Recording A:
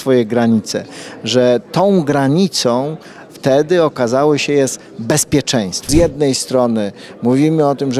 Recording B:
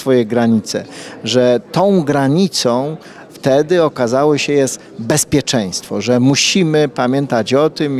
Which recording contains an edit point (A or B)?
A